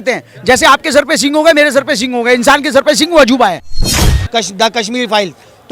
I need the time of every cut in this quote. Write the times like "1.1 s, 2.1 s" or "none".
3.9 s